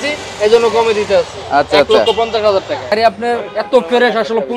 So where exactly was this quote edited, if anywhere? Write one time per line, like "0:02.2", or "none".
0:02.9

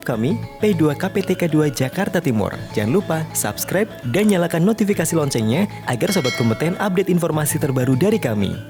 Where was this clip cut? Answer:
none

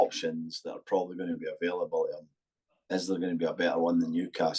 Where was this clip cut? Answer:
none

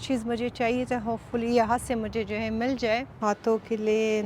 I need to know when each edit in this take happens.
0:03.1

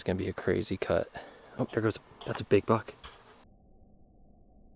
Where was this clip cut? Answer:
0:03.5

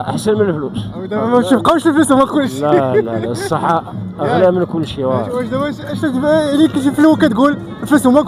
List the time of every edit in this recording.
none

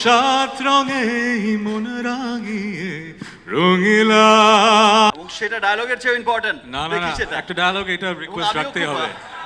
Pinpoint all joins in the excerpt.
0:05.1

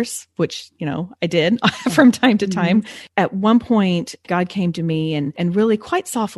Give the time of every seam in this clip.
0:03.0
0:04.2
0:05.3

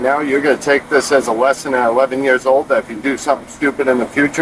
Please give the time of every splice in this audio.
none

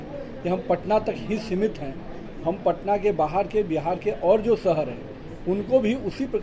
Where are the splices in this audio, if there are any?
none

